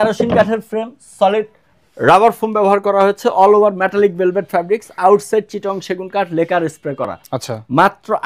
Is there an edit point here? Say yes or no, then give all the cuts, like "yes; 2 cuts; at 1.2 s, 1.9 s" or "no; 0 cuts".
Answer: no; 0 cuts